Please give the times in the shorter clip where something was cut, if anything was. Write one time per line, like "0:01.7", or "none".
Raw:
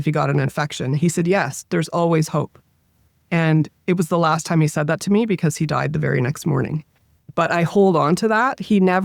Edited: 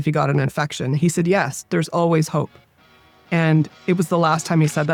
none